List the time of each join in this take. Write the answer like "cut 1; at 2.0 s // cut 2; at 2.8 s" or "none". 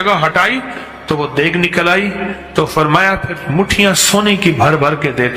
none